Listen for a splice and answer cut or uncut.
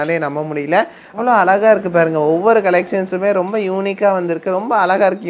cut